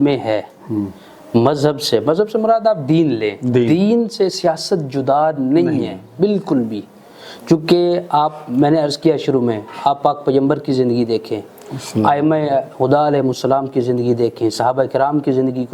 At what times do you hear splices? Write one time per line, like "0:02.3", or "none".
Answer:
none